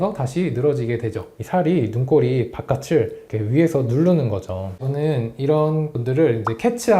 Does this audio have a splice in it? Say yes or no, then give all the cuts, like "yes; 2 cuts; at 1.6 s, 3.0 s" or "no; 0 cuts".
yes; 2 cuts; at 1.3 s, 4.6 s